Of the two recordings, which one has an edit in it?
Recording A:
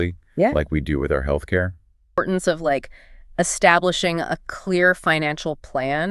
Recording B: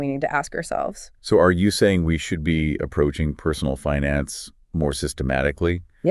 A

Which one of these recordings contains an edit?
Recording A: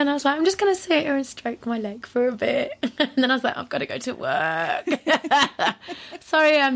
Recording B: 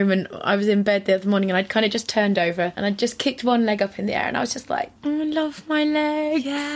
B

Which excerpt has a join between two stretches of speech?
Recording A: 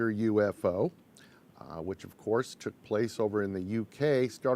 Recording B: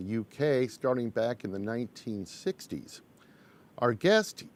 A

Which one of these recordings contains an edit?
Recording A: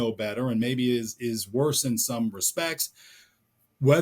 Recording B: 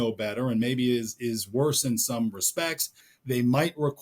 B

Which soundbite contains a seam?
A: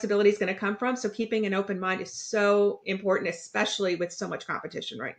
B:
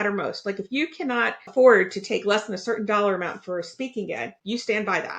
B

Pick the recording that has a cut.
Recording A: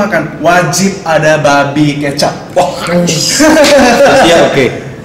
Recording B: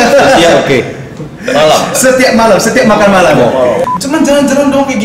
B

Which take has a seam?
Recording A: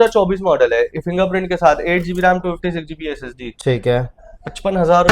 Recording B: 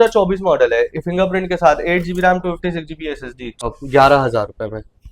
B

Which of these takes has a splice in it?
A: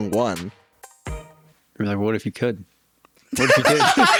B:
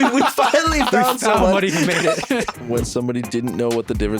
B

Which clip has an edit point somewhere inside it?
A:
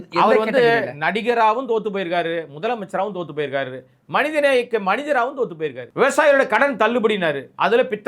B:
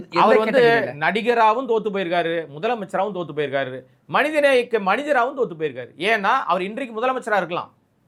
A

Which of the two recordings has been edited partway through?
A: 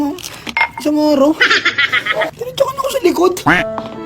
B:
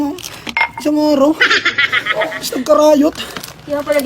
A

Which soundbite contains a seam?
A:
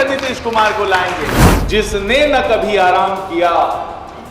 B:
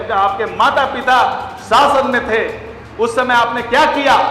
A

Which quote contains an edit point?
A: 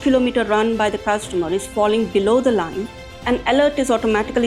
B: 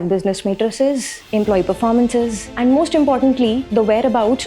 B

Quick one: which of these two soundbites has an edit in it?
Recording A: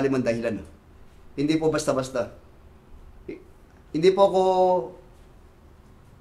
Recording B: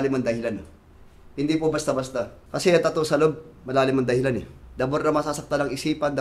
B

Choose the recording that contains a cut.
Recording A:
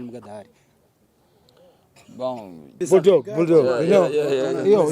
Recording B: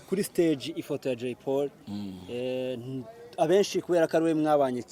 A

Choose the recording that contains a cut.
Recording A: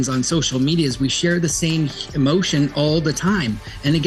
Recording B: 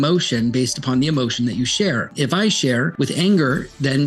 B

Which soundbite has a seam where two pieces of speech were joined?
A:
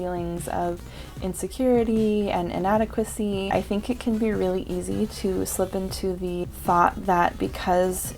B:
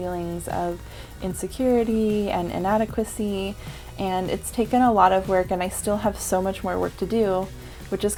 A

